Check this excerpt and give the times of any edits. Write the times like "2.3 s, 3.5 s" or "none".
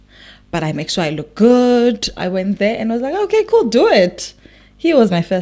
2.2 s